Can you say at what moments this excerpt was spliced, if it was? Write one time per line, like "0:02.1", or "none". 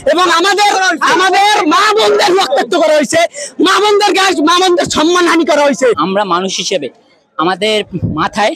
0:06.0